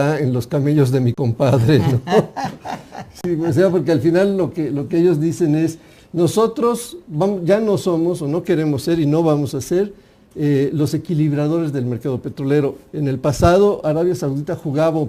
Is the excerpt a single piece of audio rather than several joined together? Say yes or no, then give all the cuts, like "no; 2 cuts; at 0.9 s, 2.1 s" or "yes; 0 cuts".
no; 1 cut; at 3.4 s